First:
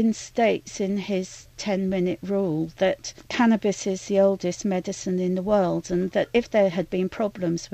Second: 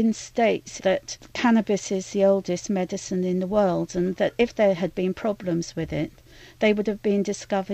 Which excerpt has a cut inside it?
second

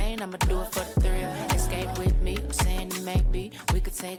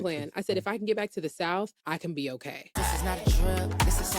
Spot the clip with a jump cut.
second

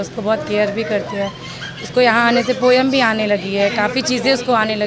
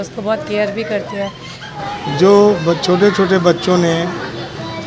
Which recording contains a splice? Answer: second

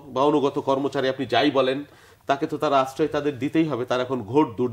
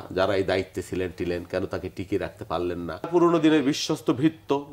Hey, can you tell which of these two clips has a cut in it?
second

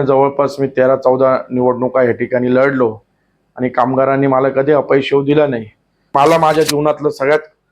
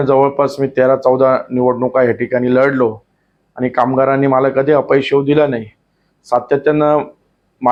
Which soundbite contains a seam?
first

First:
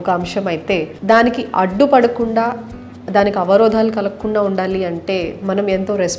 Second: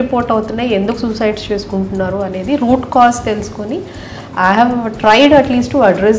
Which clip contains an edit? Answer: first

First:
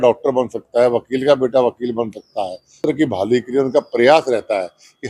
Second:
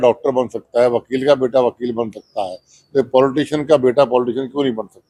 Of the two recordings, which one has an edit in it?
first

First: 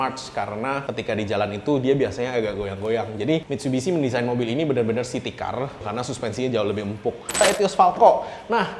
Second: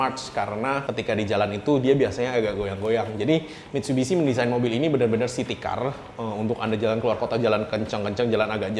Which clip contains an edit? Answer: first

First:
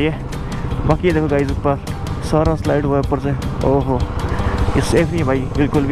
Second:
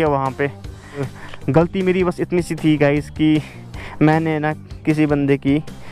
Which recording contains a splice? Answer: second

